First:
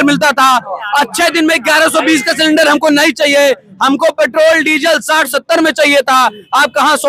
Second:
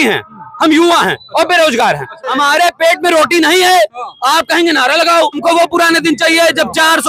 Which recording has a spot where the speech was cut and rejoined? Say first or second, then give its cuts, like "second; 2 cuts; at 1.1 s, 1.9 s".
second; 2 cuts; at 2.2 s, 5.4 s